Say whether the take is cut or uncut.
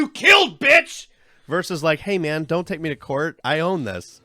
uncut